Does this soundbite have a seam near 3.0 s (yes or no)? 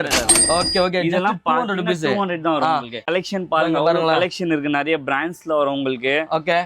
yes